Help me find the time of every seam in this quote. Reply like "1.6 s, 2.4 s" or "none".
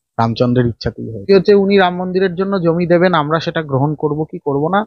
1.3 s